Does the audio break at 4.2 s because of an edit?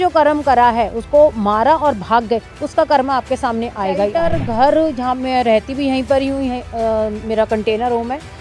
yes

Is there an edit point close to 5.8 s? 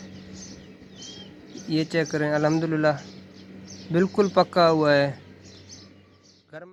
no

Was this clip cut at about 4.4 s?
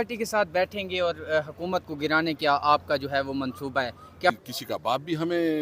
yes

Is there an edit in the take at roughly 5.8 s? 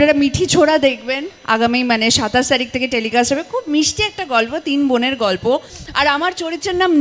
yes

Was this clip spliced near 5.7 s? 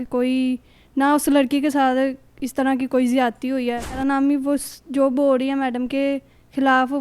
no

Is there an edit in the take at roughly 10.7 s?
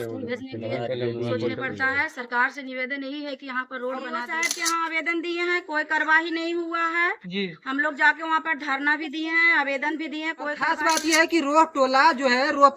yes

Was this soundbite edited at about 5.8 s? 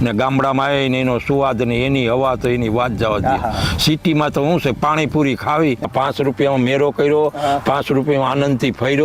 yes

